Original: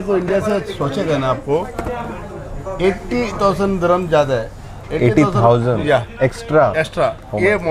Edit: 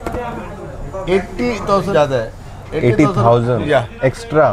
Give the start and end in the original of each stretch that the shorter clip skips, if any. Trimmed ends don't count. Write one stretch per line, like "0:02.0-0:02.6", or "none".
0:03.6-0:04.1